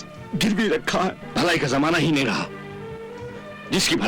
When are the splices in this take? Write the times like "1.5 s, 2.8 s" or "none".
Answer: 1.2 s